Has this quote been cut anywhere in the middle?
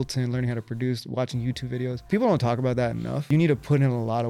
yes; 2 cuts; at 2.1 s, 3.3 s

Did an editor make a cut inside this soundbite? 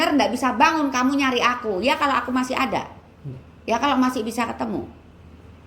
no; 0 cuts

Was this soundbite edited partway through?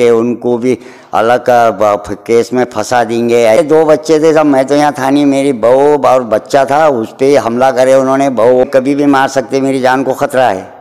yes; 2 cuts; at 3.6 s, 8.6 s

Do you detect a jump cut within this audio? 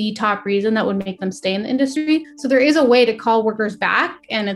yes; 1 cut; at 2.1 s

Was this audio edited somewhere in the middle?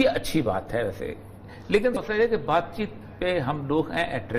yes; 1 cut; at 2.0 s

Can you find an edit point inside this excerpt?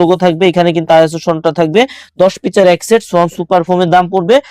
no; 0 cuts

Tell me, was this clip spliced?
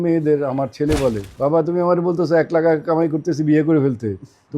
yes; 1 cut; at 1.3 s

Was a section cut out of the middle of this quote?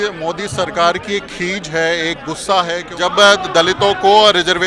yes; 1 cut; at 2.8 s

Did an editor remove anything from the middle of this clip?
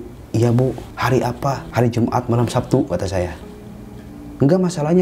yes; 3 cuts; at 0.9 s, 1.6 s, 3.5 s

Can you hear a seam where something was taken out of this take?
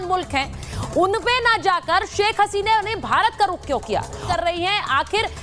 yes; 1 cut; at 4.2 s

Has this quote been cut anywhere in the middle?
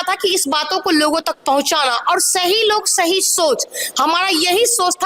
no; 0 cuts

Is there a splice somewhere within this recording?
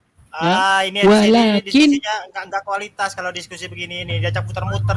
no; 0 cuts

